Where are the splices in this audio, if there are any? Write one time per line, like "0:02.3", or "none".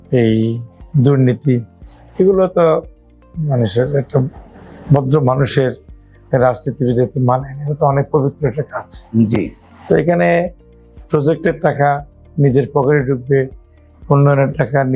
none